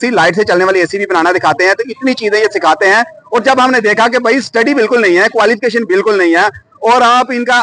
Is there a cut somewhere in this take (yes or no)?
no